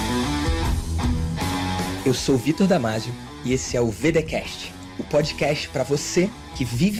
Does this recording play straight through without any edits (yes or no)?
yes